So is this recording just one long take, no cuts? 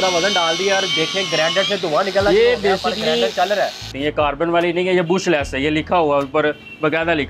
no; 1 cut; at 3.9 s

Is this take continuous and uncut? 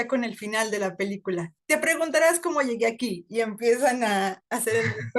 no; 1 cut; at 1.5 s

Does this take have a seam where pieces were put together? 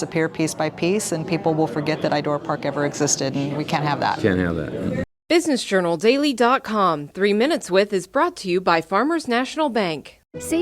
yes; 1 cut; at 5.1 s

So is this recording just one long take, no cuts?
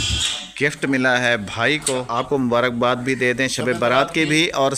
no; 1 cut; at 2.3 s

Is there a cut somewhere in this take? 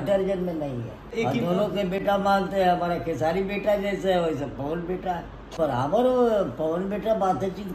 yes; 2 cuts; at 1.1 s, 5.5 s

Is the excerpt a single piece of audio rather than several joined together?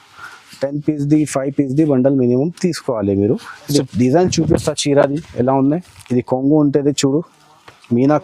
no; 1 cut; at 3.8 s

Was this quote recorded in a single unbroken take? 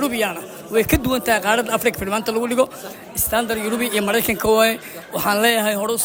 yes; 0 cuts

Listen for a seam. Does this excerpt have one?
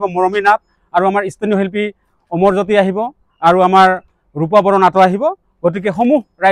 no; 0 cuts

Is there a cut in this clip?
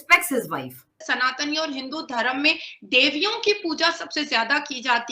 yes; 1 cut; at 1.1 s

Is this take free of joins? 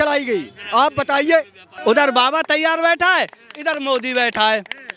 no; 1 cut; at 1.7 s

